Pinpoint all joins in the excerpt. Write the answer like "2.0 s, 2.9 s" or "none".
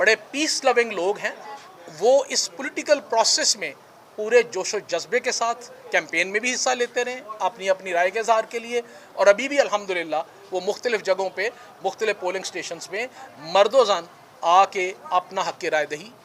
none